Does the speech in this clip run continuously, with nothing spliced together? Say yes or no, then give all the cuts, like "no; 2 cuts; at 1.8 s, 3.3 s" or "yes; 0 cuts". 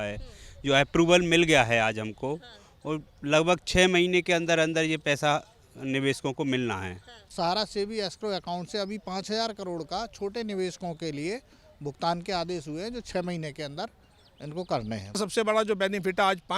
no; 2 cuts; at 7.3 s, 15.2 s